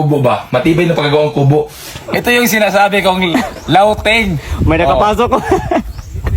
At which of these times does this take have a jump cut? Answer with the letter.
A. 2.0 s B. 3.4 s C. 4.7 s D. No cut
A